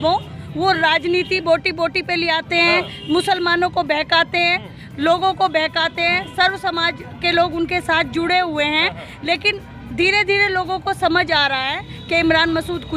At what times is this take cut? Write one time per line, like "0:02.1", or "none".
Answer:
none